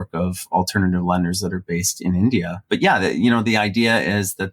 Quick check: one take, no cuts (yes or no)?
no